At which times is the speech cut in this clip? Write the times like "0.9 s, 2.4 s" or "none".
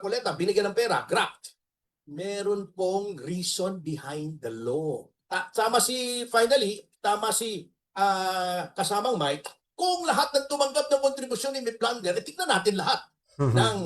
5.1 s